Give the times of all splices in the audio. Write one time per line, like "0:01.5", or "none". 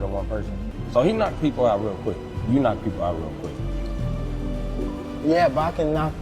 none